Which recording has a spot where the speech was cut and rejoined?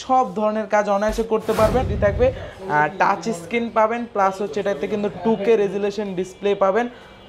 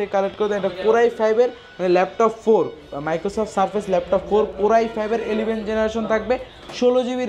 first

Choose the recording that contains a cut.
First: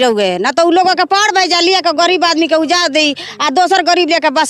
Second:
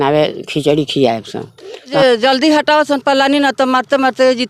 second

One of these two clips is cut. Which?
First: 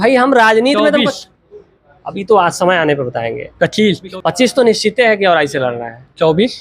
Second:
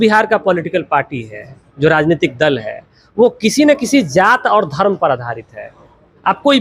first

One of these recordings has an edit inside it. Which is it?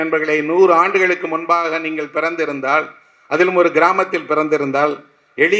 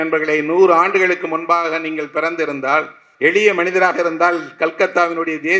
second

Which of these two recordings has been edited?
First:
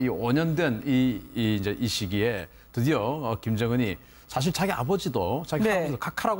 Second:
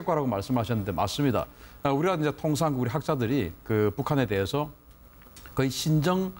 second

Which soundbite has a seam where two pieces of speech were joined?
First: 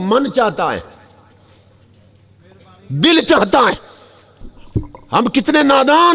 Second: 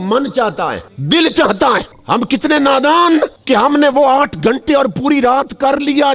second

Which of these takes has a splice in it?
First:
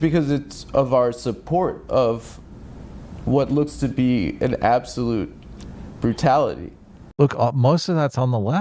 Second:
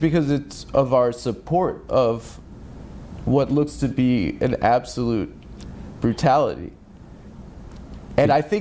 second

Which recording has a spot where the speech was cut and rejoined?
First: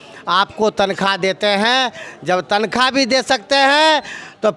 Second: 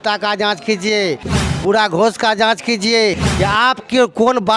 second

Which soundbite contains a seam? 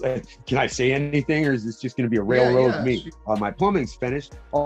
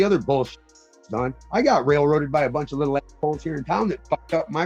first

